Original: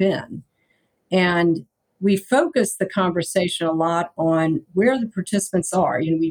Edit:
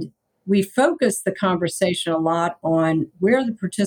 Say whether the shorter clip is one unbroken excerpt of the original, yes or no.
yes